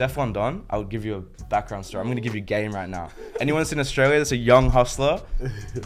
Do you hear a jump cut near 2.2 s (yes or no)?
no